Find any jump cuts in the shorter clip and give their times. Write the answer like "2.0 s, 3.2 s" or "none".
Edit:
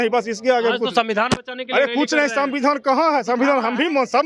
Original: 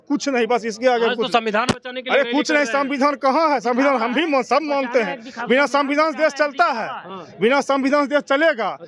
none